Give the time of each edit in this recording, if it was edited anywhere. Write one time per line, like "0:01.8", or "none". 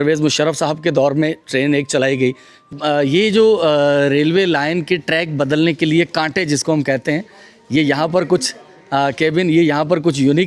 0:02.7